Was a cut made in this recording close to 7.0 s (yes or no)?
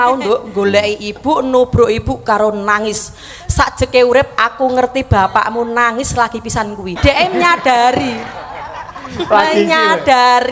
yes